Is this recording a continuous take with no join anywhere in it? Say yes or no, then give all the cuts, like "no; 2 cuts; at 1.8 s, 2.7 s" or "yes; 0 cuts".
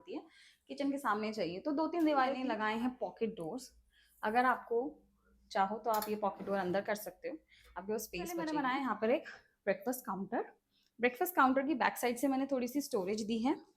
no; 2 cuts; at 2.4 s, 8.4 s